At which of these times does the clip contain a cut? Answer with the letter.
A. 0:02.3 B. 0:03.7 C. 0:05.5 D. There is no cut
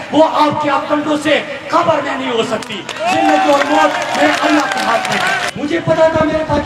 C